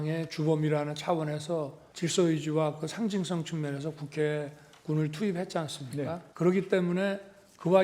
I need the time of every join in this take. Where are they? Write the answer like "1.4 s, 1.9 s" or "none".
1.8 s, 6.2 s